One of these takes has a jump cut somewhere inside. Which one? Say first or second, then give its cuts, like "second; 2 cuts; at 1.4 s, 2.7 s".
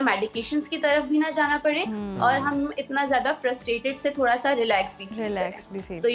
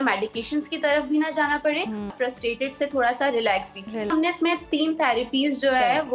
second; 2 cuts; at 2.1 s, 4.1 s